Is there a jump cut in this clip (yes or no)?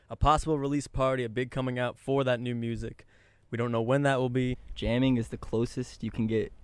yes